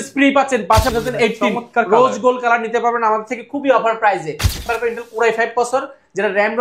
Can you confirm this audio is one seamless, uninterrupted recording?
no; 2 cuts; at 0.9 s, 4.6 s

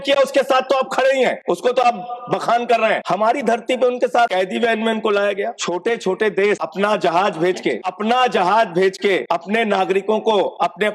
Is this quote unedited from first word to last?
no; 7 cuts; at 1.4 s, 3.0 s, 4.3 s, 5.6 s, 6.7 s, 7.9 s, 9.2 s

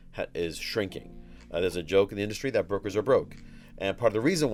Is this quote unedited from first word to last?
yes; 0 cuts

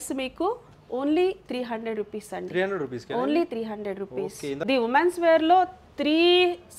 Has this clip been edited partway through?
yes; 1 cut; at 4.6 s

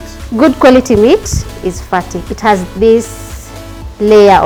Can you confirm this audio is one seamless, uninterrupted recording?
yes; 0 cuts

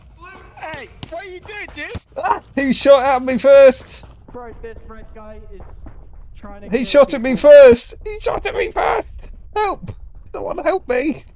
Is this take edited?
no; 0 cuts

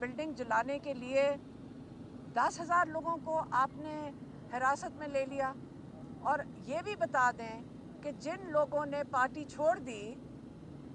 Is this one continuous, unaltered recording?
yes; 0 cuts

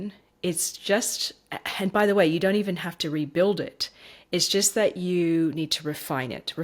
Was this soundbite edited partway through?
no; 0 cuts

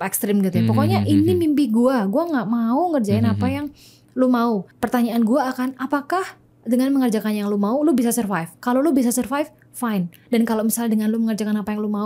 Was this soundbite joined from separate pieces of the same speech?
no; 0 cuts

